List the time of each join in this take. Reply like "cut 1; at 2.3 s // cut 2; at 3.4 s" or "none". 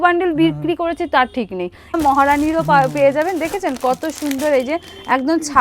cut 1; at 1.9 s

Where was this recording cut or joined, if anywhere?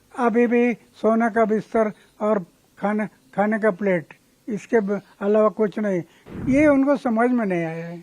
cut 1; at 6.2 s

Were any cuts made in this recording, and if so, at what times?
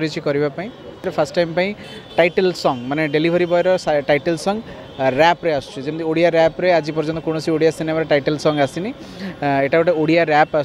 cut 1; at 1.1 s

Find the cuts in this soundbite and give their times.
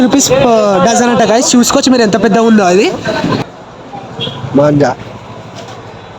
cut 1; at 3.4 s

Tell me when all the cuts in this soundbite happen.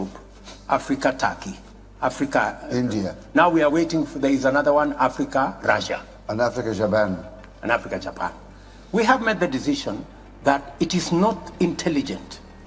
cut 1; at 3.7 s

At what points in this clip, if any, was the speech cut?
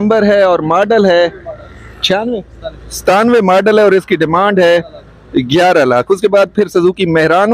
none

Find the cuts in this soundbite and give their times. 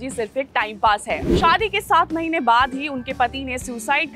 cut 1; at 1.2 s

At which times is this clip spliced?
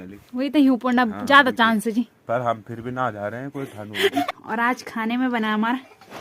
cut 1; at 4.2 s

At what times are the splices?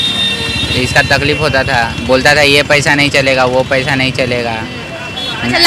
none

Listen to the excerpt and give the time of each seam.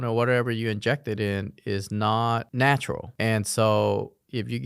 cut 1; at 2.5 s

